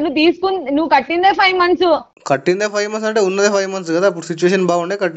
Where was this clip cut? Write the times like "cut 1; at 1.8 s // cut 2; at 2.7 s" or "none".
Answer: cut 1; at 2.1 s